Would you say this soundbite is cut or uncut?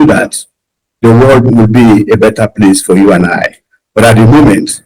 uncut